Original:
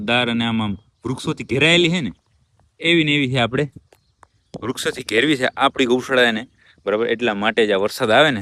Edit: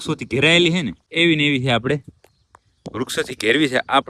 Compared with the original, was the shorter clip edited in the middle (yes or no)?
yes